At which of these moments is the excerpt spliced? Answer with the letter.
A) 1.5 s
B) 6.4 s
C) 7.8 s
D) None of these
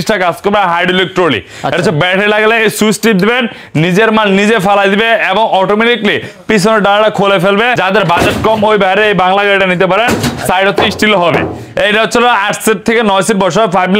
C